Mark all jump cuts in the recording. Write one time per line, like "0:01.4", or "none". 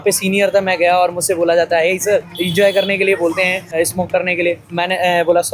0:02.4
0:03.8
0:04.6

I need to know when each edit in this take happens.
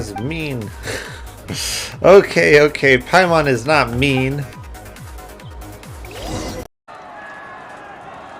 0:06.8

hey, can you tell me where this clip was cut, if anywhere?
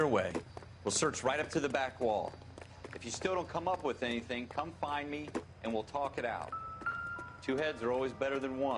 none

